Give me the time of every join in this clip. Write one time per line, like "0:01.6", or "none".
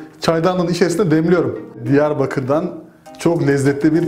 0:01.8